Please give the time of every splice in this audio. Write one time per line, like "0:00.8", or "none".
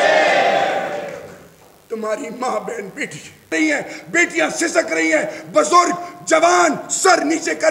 0:03.5